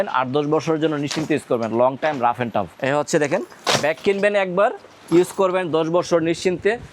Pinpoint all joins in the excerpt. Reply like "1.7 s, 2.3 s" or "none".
2.8 s